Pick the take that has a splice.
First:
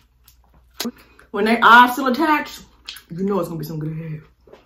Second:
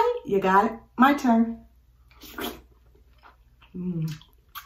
first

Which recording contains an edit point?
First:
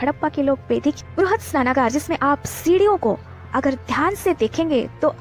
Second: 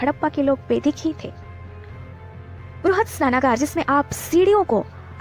first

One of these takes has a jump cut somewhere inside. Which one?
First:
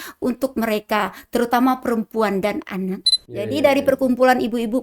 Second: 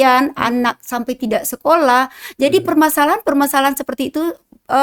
first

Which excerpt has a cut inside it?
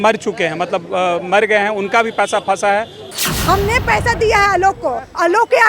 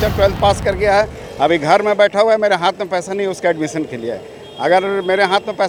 first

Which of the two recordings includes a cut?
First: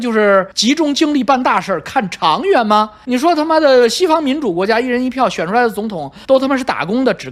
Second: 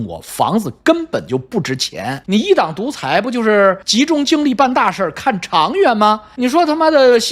second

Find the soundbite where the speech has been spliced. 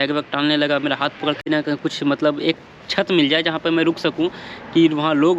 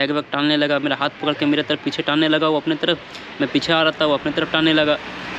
first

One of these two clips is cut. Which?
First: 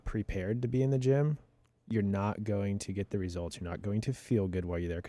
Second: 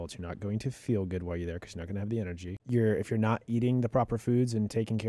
second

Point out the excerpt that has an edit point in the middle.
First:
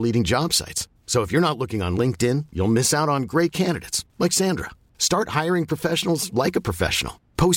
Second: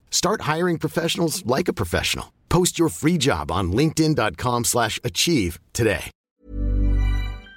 second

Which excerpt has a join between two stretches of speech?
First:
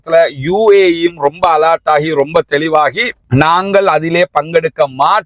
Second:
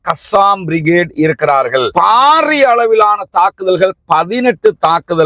second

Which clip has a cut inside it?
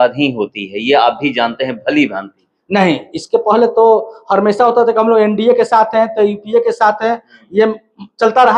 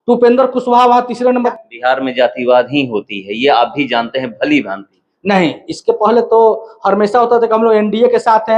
second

